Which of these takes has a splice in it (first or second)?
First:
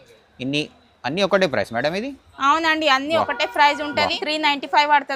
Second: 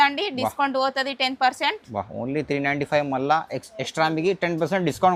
first